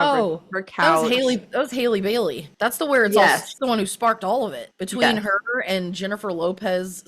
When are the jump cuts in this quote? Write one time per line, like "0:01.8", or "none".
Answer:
0:03.5